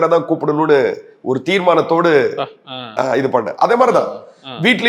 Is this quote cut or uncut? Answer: uncut